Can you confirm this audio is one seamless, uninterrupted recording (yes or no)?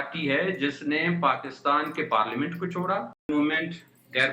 no